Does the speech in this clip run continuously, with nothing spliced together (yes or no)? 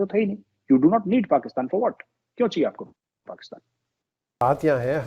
yes